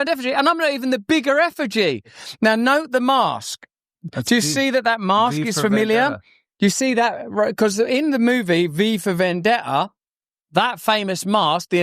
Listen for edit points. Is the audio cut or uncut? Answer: cut